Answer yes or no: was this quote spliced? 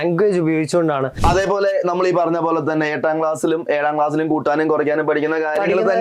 yes